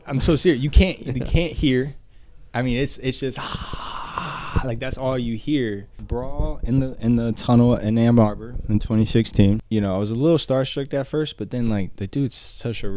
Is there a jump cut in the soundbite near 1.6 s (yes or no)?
no